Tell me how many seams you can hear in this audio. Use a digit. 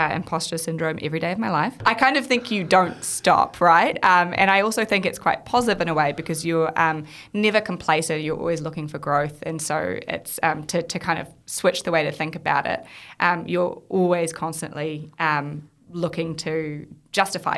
1